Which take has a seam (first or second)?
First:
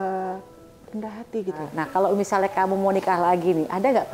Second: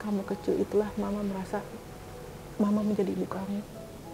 first